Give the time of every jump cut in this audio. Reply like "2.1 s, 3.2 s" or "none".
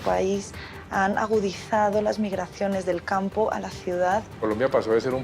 4.3 s